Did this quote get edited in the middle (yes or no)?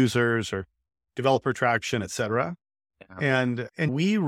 no